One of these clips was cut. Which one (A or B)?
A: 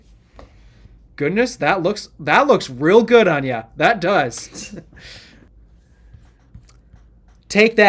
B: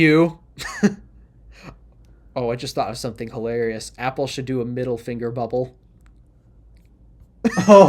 A